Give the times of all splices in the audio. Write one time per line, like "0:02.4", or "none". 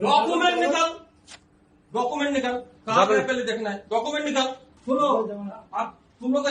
0:04.7